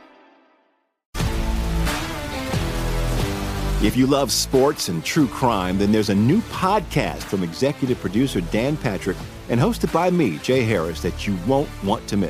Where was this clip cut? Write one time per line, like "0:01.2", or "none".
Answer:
none